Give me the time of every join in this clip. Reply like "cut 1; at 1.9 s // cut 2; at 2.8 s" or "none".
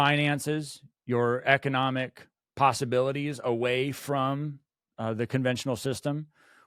none